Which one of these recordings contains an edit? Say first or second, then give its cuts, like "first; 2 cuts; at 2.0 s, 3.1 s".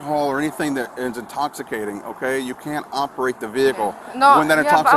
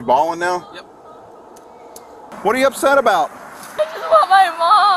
second; 2 cuts; at 2.3 s, 3.8 s